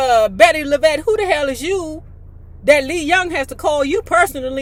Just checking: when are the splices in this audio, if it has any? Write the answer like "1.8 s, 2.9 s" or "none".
none